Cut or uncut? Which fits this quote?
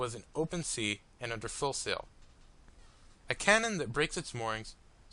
cut